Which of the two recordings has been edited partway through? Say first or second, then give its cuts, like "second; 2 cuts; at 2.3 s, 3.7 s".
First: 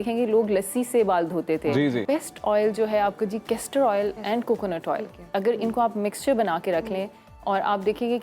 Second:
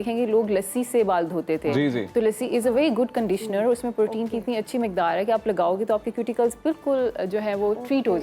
first; 1 cut; at 2.0 s